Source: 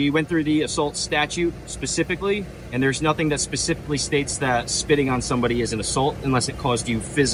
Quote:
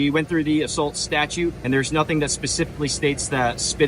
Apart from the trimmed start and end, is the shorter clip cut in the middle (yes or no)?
yes